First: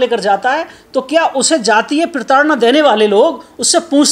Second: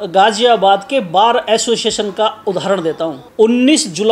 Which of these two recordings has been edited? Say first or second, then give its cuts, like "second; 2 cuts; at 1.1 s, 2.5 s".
second; 1 cut; at 3.2 s